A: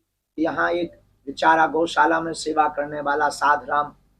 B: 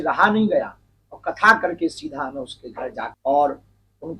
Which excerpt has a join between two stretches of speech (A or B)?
B